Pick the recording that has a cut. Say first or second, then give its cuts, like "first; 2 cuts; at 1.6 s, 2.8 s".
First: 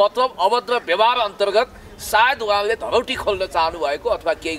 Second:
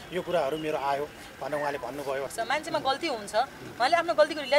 second; 1 cut; at 2.3 s